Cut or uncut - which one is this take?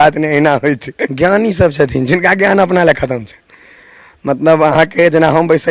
cut